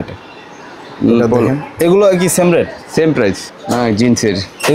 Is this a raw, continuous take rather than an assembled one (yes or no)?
no